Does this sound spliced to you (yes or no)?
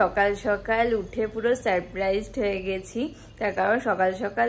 no